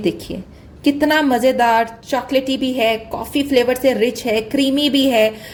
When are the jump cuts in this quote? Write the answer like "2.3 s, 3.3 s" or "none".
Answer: none